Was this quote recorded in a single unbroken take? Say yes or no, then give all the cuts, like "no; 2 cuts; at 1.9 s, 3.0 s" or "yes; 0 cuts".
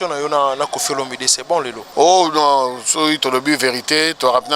no; 1 cut; at 1.8 s